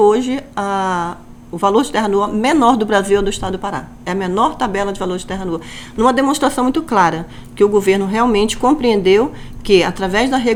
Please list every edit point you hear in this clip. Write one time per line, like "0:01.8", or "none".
none